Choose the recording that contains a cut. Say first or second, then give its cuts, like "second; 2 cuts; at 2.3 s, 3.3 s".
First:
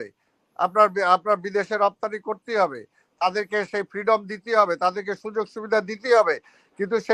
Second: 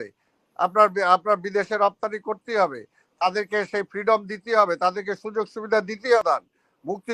second; 1 cut; at 6.2 s